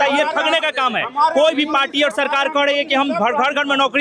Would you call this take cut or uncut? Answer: uncut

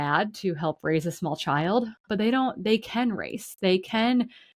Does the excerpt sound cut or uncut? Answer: uncut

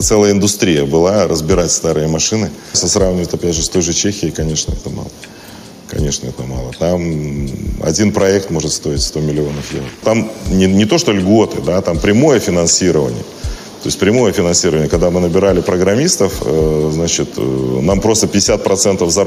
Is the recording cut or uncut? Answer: cut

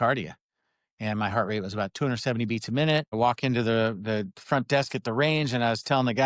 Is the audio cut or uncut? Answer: cut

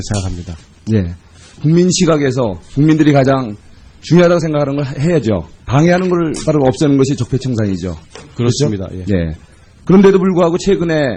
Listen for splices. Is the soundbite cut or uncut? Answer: cut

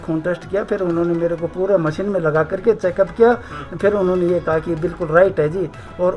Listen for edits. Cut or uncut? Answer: uncut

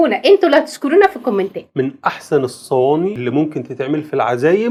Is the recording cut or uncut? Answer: uncut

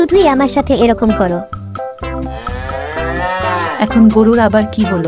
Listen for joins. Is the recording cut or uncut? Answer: uncut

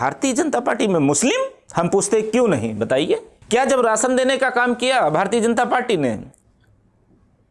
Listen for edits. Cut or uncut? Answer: cut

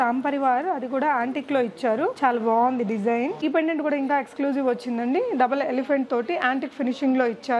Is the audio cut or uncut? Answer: cut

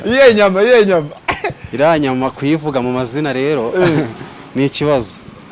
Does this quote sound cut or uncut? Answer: uncut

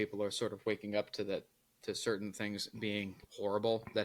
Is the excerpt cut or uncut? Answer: uncut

